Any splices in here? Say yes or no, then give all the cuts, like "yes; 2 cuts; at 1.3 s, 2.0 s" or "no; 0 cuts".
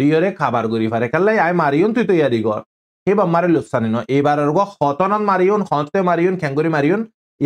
no; 0 cuts